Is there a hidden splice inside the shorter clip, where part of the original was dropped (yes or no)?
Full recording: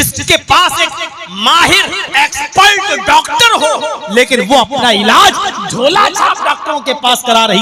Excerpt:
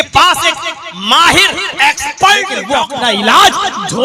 yes